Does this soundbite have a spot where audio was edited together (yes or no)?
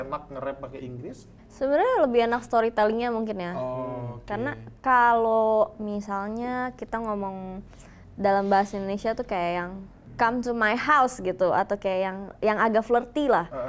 no